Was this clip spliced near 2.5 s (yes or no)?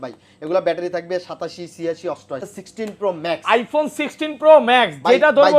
yes